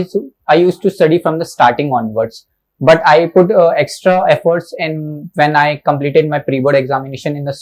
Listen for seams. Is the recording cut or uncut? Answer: uncut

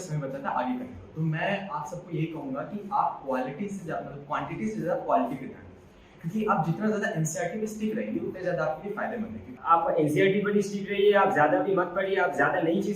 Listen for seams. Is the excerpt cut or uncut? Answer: cut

